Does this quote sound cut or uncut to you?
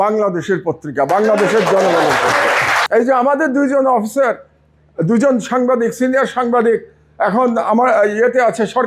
cut